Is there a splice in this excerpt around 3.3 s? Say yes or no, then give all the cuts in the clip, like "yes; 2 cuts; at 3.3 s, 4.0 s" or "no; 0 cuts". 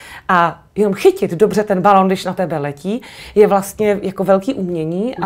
no; 0 cuts